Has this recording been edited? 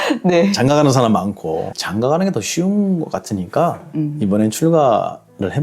yes; 1 cut; at 1.7 s

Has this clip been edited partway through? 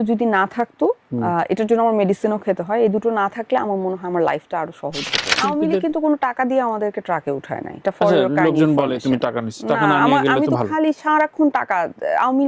yes; 1 cut; at 5.4 s

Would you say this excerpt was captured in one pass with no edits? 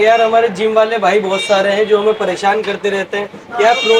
yes; 0 cuts

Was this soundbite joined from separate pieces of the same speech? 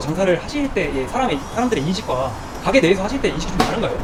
no; 0 cuts

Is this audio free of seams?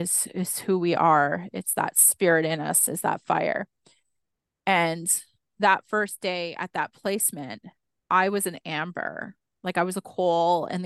yes; 0 cuts

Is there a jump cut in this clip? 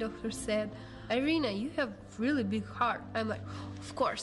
yes; 1 cut; at 1.1 s

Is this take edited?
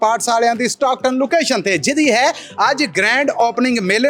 no; 0 cuts

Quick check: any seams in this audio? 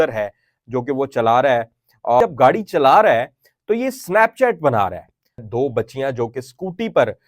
yes; 2 cuts; at 2.2 s, 5.5 s

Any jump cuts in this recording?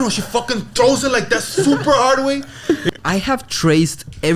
yes; 1 cut; at 2.8 s

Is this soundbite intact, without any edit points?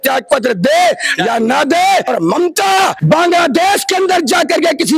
no; 2 cuts; at 2.1 s, 3.0 s

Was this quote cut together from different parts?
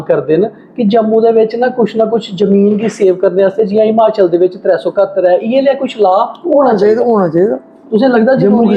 no; 0 cuts

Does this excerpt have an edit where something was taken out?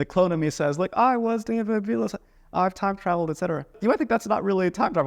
yes; 1 cut; at 3.7 s

